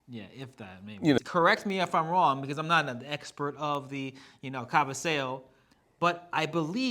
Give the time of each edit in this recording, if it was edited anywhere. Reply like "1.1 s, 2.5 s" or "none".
1.2 s